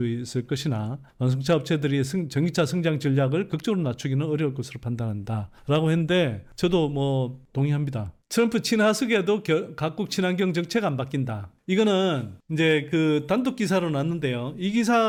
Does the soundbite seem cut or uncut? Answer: uncut